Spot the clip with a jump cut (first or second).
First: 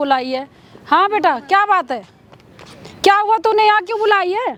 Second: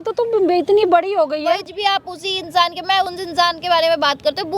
second